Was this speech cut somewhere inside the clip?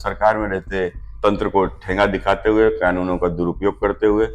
yes; 1 cut; at 1.0 s

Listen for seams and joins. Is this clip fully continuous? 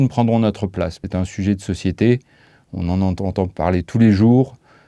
no; 1 cut; at 1.0 s

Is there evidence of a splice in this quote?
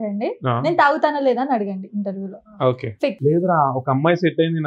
yes; 1 cut; at 3.2 s

